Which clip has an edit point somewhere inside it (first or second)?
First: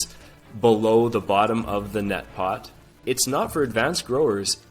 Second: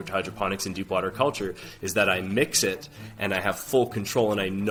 first